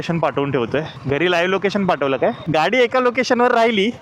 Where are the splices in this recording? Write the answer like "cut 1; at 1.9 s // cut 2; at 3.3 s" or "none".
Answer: cut 1; at 2.4 s